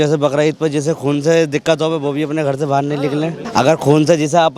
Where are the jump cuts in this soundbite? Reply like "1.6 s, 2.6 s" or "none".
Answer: 3.4 s

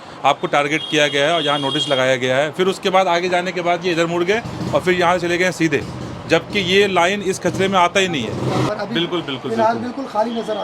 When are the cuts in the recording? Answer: 8.7 s

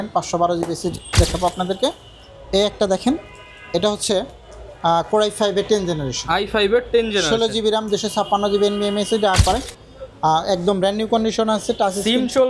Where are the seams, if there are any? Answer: 1.2 s, 9.4 s

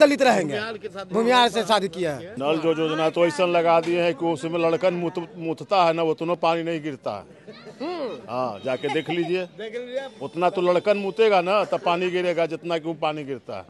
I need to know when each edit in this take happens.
2.3 s

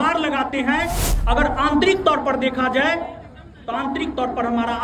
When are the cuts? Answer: 1.1 s

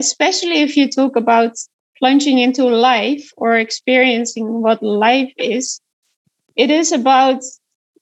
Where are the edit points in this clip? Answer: 1.7 s, 6.3 s

